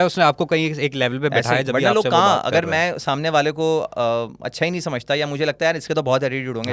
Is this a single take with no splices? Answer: yes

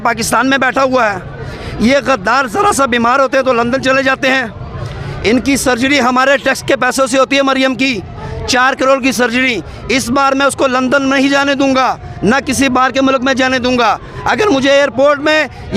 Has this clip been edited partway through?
no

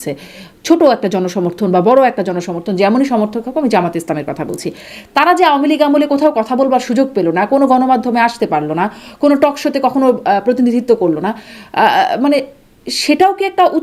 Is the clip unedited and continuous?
yes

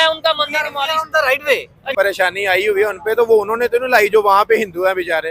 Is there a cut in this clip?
yes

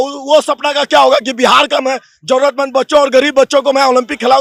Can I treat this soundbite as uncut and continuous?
yes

